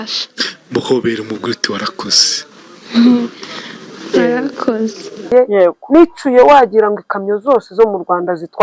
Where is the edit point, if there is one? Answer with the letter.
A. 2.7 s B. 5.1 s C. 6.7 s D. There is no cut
B